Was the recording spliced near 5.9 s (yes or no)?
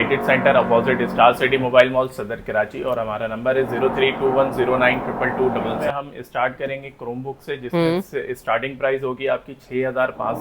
yes